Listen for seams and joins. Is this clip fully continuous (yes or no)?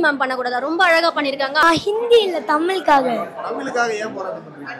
no